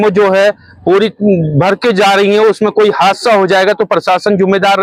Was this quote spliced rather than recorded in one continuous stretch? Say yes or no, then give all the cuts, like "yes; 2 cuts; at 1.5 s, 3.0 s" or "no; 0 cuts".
no; 0 cuts